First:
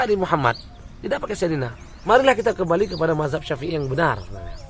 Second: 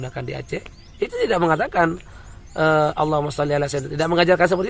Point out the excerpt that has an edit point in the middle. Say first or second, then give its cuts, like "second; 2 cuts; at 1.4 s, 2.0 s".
first; 1 cut; at 1.9 s